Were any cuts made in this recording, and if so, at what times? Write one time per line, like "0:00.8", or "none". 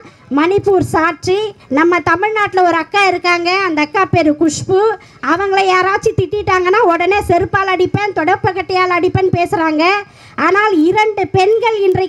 0:01.6